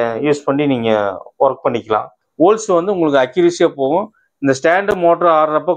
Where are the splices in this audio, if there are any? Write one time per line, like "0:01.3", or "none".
0:02.2